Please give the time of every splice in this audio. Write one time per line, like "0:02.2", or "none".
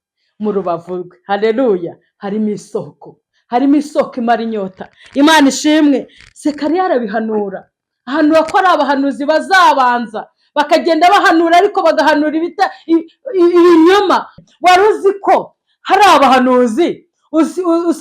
0:14.4